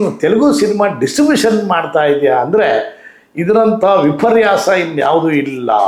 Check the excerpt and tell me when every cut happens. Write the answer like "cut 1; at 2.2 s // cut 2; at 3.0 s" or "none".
none